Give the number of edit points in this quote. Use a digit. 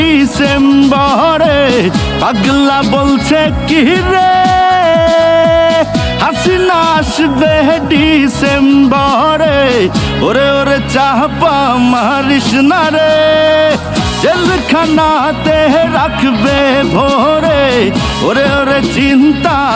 0